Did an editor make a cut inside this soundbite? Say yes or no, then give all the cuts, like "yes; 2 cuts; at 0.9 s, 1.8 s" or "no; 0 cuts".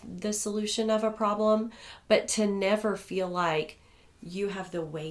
no; 0 cuts